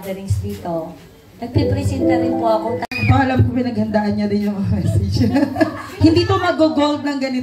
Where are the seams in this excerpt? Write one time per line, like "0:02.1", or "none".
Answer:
0:03.0